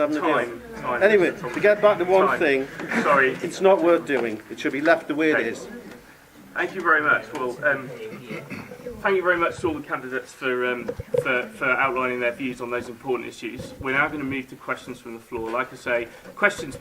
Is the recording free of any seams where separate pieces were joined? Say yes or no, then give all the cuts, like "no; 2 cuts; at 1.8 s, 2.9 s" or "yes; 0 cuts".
no; 1 cut; at 5.8 s